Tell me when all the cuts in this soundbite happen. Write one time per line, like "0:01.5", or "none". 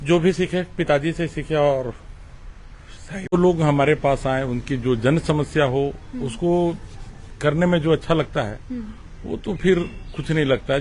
0:03.3